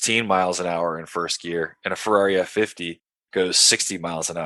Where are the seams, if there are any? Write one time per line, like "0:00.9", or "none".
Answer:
none